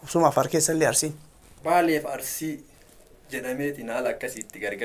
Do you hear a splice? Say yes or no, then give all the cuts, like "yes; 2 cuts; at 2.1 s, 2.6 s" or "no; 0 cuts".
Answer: yes; 1 cut; at 1.6 s